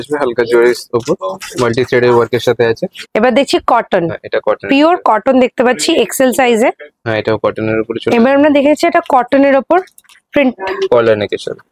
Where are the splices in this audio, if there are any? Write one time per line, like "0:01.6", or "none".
0:03.0
0:06.9